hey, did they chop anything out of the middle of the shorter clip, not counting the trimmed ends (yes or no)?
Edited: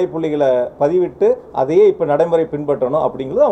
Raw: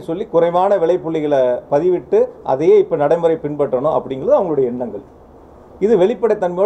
no